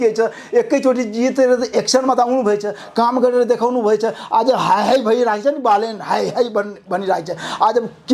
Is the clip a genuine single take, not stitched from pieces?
yes; 0 cuts

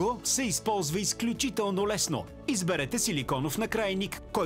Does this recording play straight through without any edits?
yes; 0 cuts

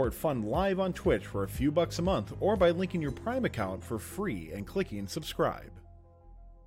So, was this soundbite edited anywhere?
yes; 1 cut; at 5.6 s

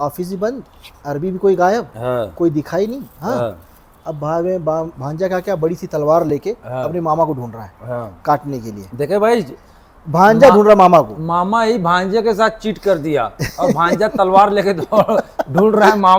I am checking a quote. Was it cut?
no; 0 cuts

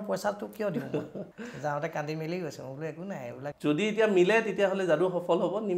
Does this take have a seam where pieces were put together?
yes; 2 cuts; at 1.2 s, 3.5 s

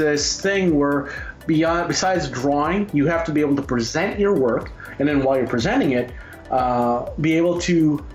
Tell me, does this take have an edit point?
no; 0 cuts

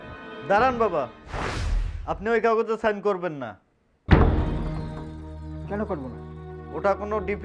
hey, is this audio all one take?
yes; 0 cuts

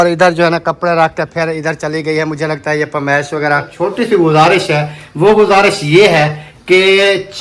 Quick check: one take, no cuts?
no; 1 cut; at 3.7 s

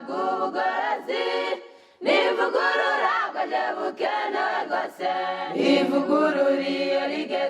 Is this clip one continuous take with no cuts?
no; 1 cut; at 5.3 s

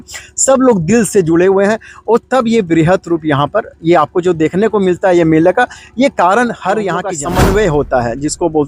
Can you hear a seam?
yes; 1 cut; at 7.1 s

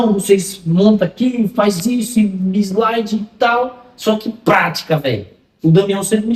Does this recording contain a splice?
no; 0 cuts

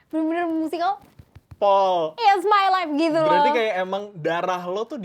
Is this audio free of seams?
yes; 0 cuts

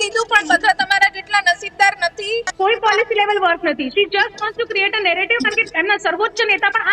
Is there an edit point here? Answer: yes; 1 cut; at 2.5 s

